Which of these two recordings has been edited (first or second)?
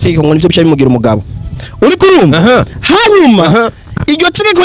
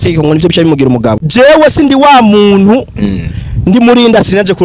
second